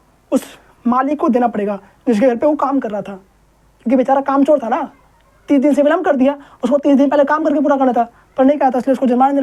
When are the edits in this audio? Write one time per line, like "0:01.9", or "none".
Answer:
none